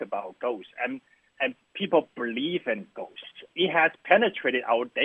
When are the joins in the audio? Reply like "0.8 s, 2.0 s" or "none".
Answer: 3.5 s